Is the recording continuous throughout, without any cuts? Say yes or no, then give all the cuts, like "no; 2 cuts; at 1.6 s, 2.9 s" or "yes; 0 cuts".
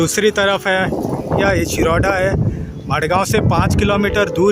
no; 1 cut; at 1.4 s